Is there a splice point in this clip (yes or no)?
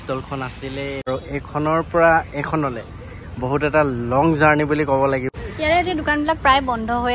yes